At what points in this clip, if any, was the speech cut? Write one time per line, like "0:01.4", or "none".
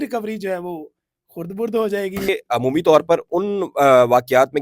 0:02.3